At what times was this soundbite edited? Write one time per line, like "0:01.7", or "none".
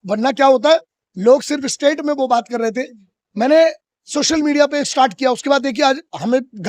none